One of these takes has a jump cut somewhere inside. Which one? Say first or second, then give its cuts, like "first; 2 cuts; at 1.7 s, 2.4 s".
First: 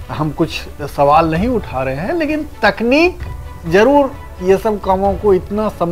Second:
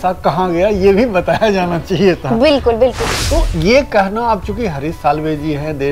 second; 1 cut; at 3.1 s